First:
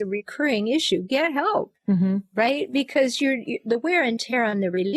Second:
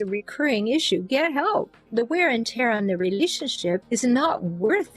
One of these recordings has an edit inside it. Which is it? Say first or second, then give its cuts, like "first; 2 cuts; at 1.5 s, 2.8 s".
second; 1 cut; at 1.8 s